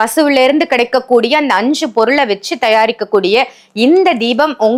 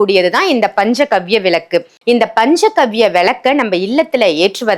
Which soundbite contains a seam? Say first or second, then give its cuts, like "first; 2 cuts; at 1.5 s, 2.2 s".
second; 1 cut; at 1.9 s